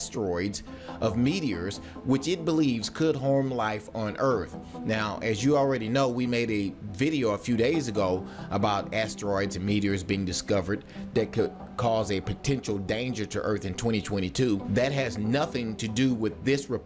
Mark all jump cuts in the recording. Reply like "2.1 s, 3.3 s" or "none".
8.0 s